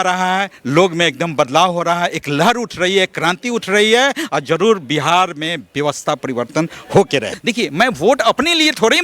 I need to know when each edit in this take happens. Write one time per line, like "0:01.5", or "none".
0:07.3